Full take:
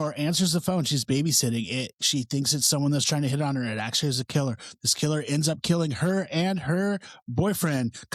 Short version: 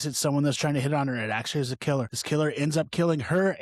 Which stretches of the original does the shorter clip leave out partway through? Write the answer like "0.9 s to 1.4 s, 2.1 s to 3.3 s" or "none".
4.6 s to 4.9 s